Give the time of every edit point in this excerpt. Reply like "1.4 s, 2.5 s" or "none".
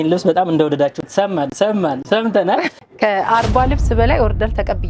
2.7 s